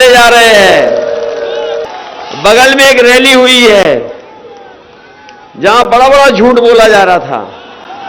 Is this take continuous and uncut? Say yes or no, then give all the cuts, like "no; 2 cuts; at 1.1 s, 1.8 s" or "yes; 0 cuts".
no; 1 cut; at 1.9 s